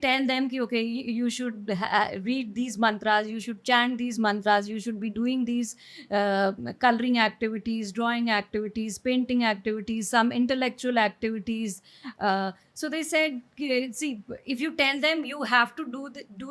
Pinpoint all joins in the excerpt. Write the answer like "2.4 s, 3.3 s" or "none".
none